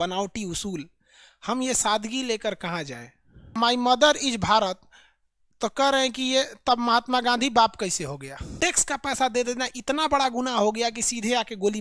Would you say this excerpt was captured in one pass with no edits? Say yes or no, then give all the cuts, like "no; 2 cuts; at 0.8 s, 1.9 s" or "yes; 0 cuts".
no; 2 cuts; at 3.5 s, 8.5 s